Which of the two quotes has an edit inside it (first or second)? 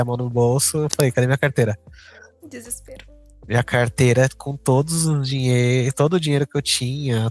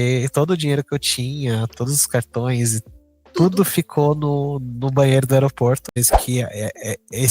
second